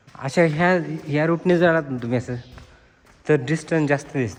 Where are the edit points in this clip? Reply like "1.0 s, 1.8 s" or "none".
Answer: none